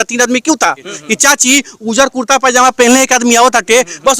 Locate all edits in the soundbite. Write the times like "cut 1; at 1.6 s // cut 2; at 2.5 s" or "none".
cut 1; at 0.9 s